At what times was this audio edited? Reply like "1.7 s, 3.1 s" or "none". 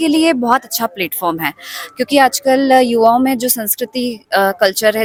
none